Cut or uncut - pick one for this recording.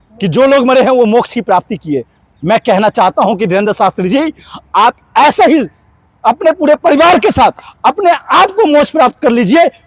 uncut